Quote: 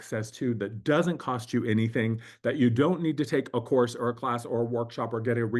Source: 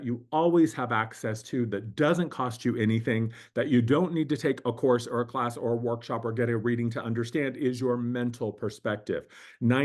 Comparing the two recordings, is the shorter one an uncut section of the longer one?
yes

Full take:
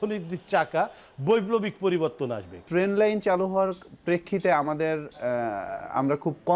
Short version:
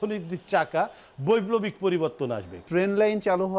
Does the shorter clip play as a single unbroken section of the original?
yes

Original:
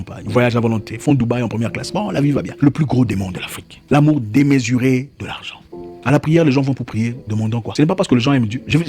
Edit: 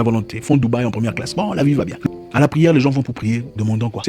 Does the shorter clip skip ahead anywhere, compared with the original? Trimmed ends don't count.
yes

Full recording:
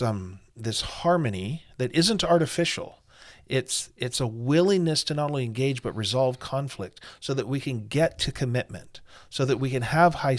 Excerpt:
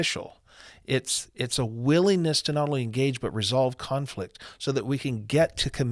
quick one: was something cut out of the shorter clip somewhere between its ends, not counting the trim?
no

